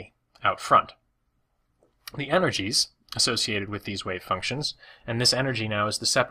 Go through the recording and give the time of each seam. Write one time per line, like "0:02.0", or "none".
none